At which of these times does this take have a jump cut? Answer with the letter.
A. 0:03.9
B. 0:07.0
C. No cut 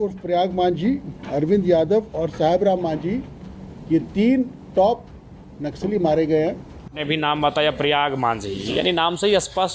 B